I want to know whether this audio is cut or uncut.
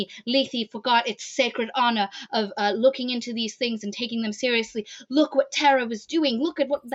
uncut